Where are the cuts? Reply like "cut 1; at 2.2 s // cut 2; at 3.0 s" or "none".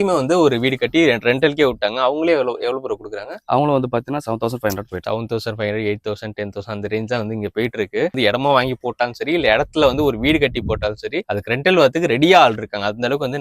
cut 1; at 5.0 s // cut 2; at 8.1 s